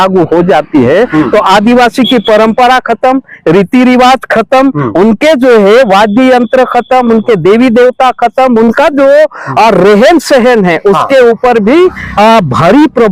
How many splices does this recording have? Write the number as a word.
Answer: zero